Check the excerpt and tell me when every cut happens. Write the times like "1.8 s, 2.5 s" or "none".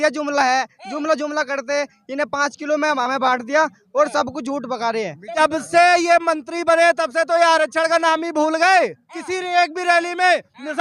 5.3 s